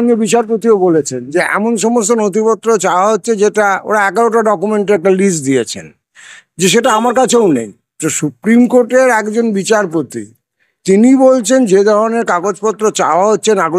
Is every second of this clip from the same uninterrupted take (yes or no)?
yes